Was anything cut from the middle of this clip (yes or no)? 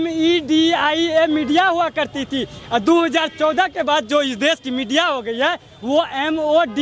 no